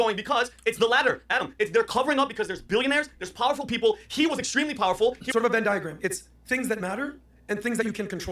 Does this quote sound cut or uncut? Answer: cut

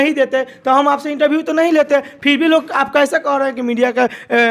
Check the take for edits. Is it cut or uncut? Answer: uncut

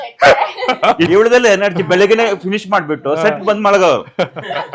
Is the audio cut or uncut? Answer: cut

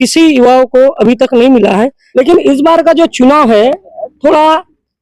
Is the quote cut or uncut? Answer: cut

